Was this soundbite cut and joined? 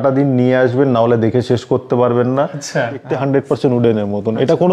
yes; 1 cut; at 3.0 s

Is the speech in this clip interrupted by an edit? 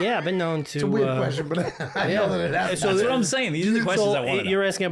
no; 0 cuts

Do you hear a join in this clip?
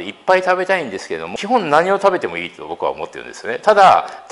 yes; 1 cut; at 1.2 s

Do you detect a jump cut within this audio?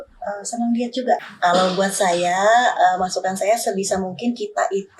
yes; 1 cut; at 1.2 s

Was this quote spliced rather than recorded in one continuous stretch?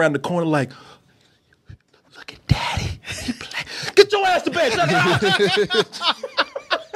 no; 0 cuts

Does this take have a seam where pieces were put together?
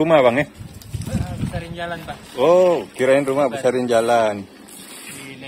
no; 0 cuts

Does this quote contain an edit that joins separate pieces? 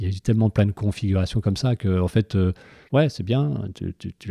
yes; 1 cut; at 2.7 s

